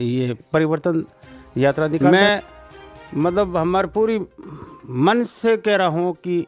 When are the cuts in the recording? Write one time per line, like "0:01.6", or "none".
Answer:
0:02.0